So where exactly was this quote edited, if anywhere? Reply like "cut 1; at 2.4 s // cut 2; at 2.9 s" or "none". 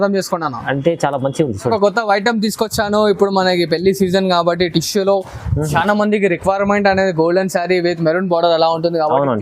cut 1; at 1.7 s